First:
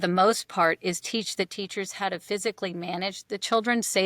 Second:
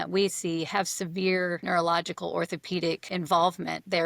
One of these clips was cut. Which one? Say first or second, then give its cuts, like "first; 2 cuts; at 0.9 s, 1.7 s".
second; 2 cuts; at 1.6 s, 3.1 s